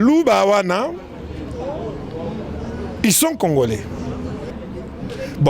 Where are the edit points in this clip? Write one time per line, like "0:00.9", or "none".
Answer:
0:04.6